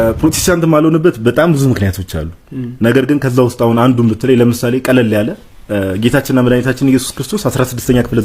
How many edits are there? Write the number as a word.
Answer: zero